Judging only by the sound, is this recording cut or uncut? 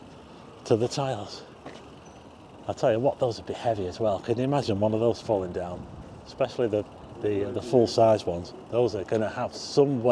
uncut